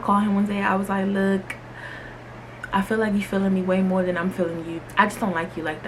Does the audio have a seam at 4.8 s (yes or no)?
yes